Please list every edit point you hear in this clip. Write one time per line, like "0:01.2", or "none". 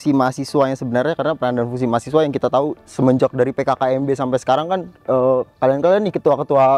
none